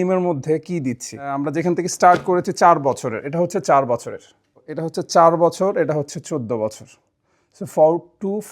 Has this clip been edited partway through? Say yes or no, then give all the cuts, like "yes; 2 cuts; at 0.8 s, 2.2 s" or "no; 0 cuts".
yes; 2 cuts; at 1.4 s, 4.8 s